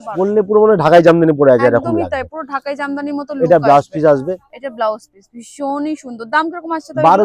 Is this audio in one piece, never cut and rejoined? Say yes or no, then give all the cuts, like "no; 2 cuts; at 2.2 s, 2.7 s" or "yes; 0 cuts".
yes; 0 cuts